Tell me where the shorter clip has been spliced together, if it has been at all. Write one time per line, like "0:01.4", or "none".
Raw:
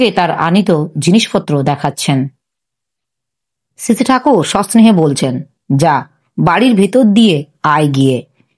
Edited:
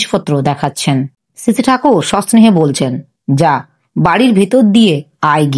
0:01.2